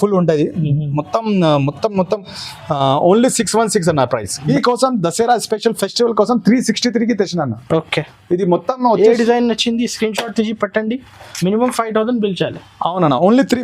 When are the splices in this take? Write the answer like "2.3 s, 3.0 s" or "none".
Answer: 4.5 s